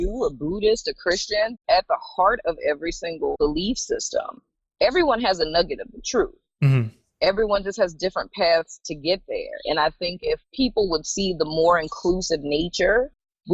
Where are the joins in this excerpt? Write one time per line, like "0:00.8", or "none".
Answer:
0:01.5
0:03.3
0:10.5